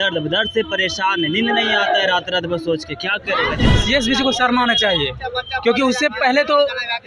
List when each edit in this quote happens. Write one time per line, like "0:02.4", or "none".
0:03.6